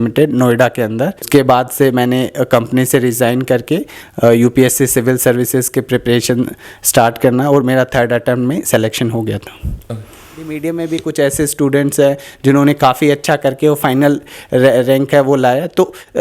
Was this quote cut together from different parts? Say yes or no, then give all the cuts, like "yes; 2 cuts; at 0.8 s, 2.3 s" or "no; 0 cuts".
yes; 2 cuts; at 1.3 s, 10.5 s